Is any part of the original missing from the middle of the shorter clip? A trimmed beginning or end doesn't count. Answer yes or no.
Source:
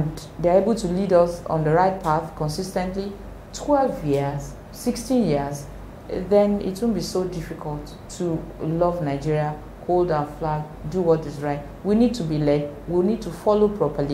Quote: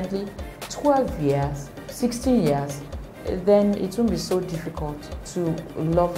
no